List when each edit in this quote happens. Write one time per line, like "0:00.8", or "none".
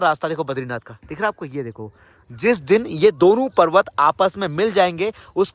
none